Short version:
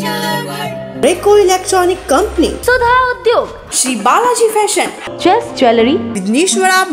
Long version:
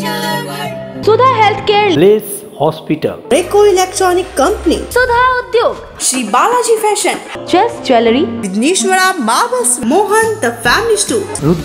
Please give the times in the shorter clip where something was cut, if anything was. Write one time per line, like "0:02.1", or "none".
0:00.9